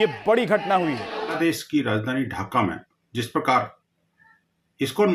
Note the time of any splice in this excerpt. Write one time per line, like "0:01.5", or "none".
0:01.4

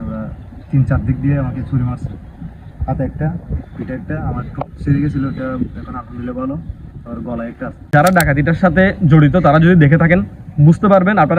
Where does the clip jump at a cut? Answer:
0:07.9

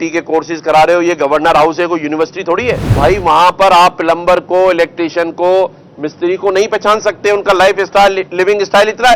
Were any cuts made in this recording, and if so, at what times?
0:03.0

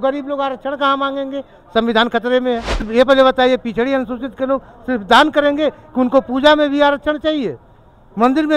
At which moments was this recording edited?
0:02.9

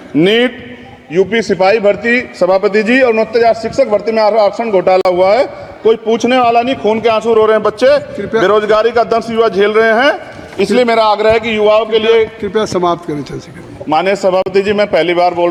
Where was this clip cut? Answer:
none

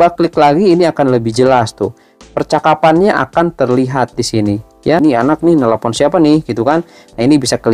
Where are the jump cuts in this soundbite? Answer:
0:05.0

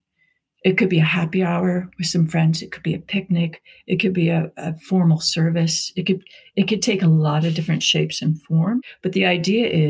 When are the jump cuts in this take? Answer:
0:08.8

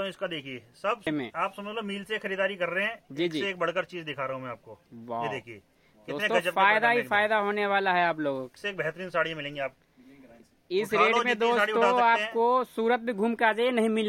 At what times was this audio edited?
0:01.1
0:08.6
0:09.8

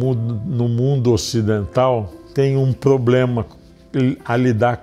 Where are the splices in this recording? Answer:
0:02.2

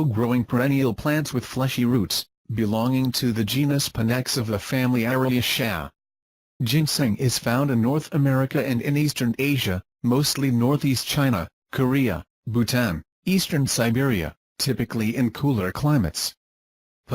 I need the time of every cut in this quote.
0:09.9

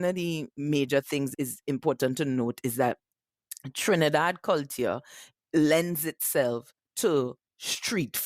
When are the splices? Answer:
0:01.3

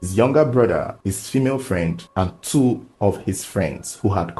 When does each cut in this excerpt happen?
0:00.9
0:02.0

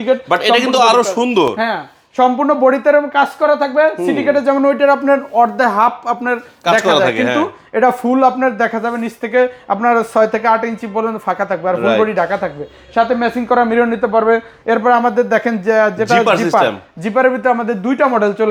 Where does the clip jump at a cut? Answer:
none

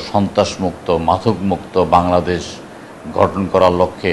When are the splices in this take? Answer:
none

